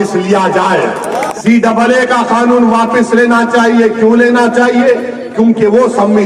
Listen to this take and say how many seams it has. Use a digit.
1